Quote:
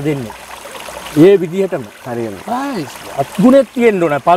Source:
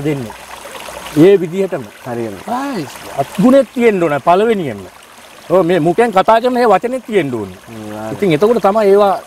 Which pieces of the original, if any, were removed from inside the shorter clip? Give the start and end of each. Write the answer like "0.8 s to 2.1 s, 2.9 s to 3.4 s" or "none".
none